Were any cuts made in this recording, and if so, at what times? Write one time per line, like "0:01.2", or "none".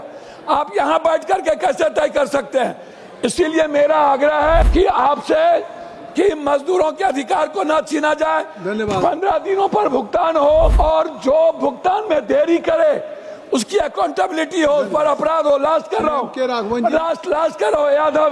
0:04.7
0:10.7